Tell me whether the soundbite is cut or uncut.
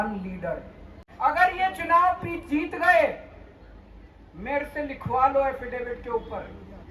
cut